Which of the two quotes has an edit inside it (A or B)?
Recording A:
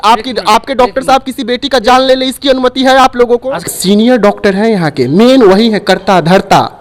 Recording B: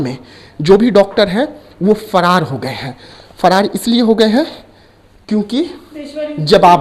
A